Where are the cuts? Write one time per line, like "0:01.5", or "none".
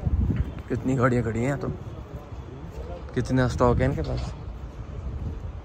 none